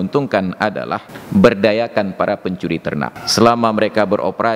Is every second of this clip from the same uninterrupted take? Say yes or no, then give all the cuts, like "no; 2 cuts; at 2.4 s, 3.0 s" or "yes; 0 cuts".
no; 2 cuts; at 1.1 s, 3.2 s